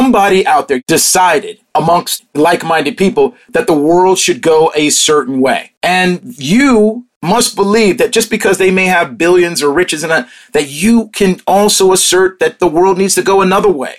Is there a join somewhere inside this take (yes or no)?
yes